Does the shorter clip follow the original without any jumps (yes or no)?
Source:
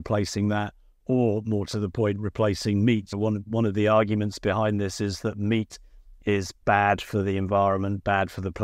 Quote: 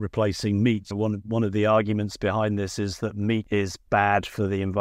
no